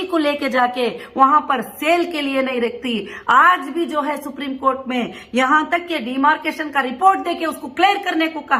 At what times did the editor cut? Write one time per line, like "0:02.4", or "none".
none